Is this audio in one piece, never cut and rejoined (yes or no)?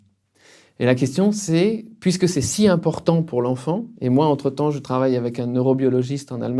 yes